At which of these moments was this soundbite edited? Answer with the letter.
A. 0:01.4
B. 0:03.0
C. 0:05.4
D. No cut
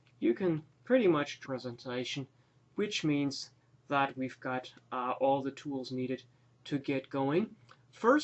D